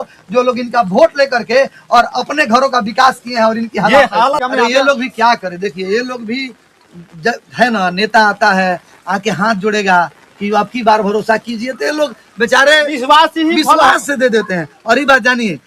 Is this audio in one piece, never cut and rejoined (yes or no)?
yes